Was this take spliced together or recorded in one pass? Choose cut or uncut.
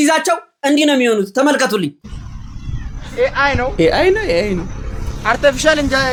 uncut